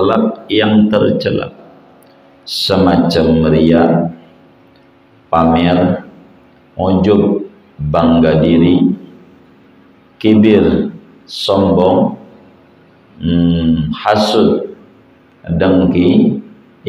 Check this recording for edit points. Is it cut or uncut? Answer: uncut